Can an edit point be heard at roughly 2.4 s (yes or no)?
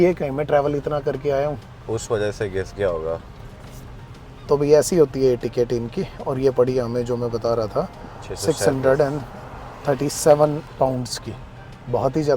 no